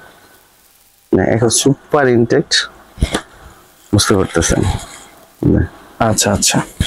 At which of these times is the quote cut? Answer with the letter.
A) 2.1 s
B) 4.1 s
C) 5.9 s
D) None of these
D